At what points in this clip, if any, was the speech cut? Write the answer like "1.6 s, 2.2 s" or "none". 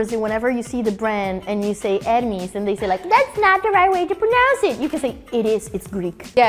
none